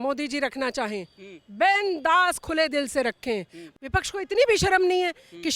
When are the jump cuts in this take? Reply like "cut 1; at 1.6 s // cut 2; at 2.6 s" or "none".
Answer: cut 1; at 3.6 s